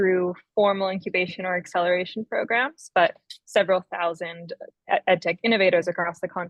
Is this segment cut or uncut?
uncut